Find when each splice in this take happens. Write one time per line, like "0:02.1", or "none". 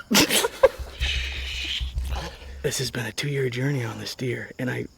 0:02.5